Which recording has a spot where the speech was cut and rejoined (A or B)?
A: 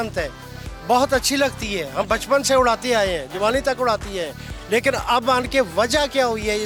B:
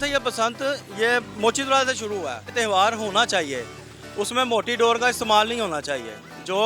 B